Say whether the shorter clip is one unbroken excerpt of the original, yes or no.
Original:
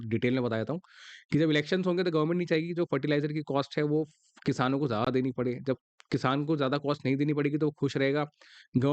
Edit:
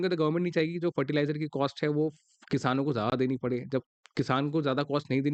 yes